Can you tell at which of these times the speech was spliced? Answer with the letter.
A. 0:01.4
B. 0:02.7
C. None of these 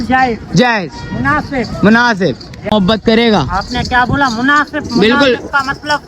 B